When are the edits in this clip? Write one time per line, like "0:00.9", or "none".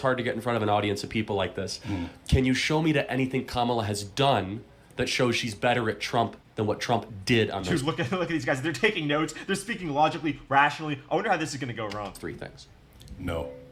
none